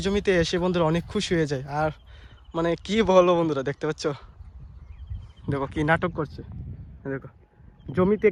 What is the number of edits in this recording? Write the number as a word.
zero